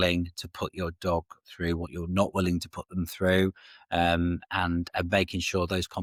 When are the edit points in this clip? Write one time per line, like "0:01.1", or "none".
none